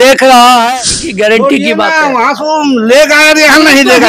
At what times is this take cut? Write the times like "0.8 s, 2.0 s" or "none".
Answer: 1.0 s